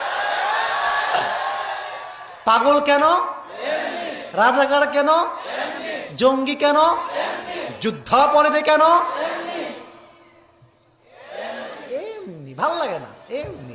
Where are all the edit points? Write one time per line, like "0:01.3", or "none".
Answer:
none